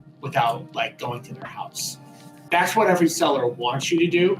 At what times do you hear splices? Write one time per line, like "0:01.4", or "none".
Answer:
0:02.4